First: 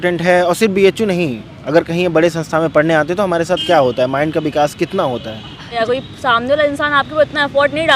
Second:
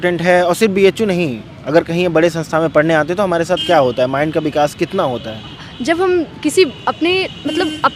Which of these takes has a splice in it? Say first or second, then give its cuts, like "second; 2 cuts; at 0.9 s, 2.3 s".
first; 1 cut; at 5.8 s